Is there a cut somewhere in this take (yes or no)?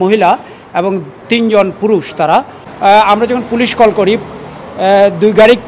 yes